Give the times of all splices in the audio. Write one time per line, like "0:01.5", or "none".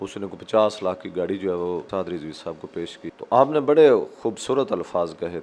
0:01.9
0:03.1